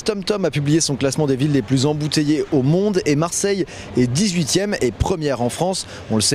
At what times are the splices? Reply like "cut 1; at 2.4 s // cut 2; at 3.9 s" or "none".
none